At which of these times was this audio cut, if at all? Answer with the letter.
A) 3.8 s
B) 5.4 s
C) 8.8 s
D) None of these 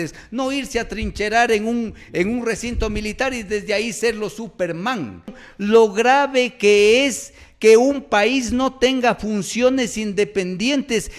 B